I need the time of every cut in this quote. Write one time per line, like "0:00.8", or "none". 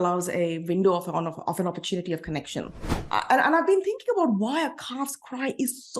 0:02.9